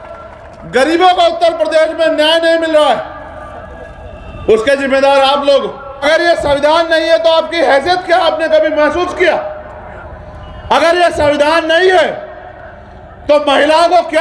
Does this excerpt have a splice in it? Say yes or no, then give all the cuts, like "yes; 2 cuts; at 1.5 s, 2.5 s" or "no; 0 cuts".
yes; 1 cut; at 6.0 s